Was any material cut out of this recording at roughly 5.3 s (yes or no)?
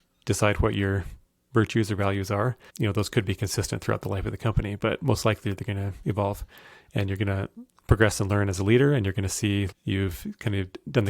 no